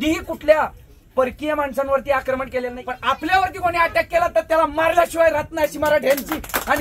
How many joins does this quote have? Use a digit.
1